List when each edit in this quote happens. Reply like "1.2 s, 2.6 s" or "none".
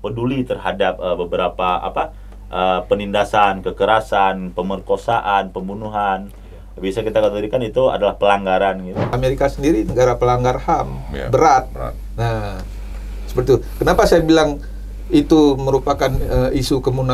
9.1 s